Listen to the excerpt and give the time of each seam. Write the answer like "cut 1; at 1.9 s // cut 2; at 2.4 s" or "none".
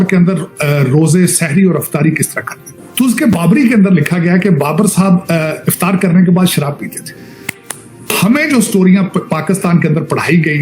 cut 1; at 2.8 s // cut 2; at 8.1 s